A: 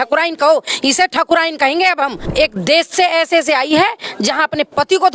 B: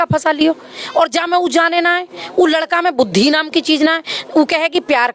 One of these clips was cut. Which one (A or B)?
A